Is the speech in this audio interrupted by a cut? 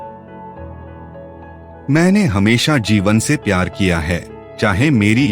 yes; 1 cut; at 1.8 s

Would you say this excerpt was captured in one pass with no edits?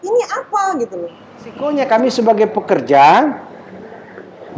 no; 1 cut; at 1.6 s

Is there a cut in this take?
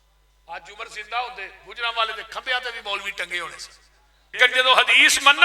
yes; 1 cut; at 4.4 s

